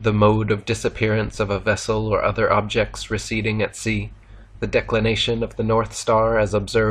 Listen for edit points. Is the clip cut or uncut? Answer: uncut